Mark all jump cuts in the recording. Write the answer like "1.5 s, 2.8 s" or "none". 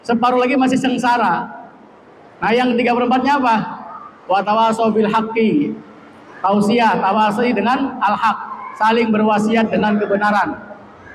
none